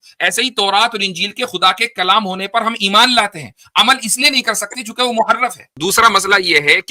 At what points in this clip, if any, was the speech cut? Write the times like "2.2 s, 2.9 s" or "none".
5.7 s